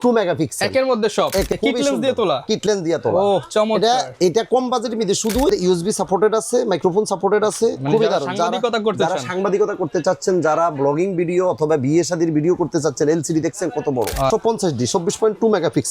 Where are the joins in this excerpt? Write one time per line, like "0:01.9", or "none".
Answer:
0:01.5
0:05.5
0:14.3